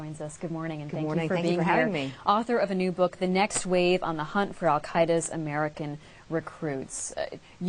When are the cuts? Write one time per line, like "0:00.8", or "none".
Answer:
0:05.3